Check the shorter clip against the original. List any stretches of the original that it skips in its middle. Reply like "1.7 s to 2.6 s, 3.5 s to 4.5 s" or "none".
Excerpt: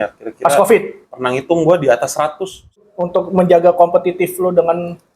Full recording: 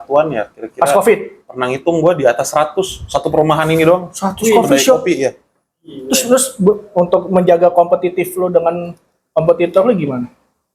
3.2 s to 6.8 s